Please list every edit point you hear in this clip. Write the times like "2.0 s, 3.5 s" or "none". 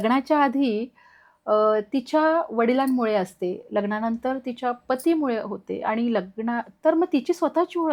none